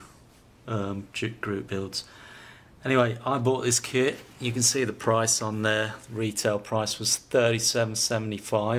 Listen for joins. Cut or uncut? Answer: uncut